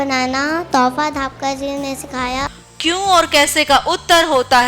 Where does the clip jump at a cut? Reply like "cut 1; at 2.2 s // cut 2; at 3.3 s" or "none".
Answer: cut 1; at 2.5 s